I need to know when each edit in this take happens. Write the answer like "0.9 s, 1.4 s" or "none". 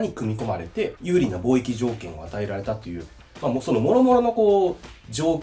1.0 s